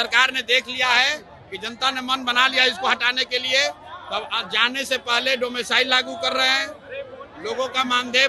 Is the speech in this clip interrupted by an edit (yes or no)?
no